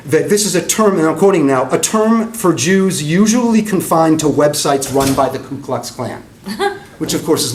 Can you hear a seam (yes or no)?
no